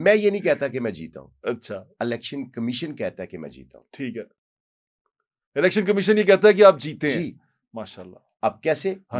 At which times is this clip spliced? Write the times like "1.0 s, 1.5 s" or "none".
none